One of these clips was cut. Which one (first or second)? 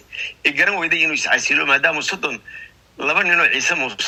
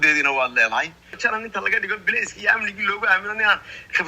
second